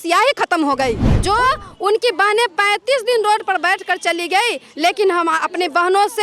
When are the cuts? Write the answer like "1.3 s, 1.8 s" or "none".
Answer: 1.1 s